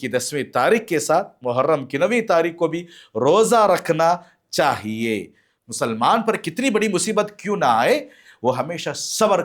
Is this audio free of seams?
no; 1 cut; at 5.6 s

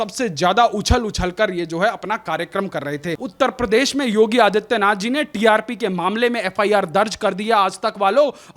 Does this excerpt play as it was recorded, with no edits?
no; 1 cut; at 3.2 s

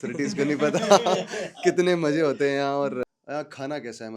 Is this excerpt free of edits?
no; 1 cut; at 3.1 s

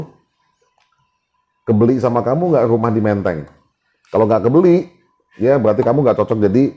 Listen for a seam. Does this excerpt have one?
no; 0 cuts

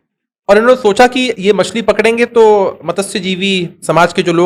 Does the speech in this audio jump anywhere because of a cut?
no; 0 cuts

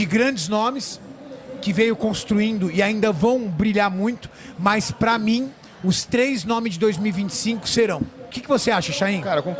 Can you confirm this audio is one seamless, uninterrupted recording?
no; 1 cut; at 8.4 s

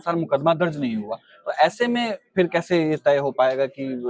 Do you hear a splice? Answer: no; 0 cuts

